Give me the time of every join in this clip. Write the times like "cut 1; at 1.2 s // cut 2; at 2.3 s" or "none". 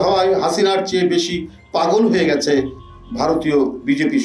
none